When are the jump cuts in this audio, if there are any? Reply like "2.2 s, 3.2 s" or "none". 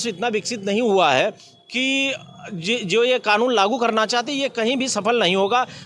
none